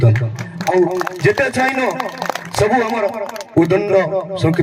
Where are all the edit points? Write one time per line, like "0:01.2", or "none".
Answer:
none